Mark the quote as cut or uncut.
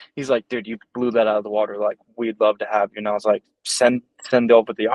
uncut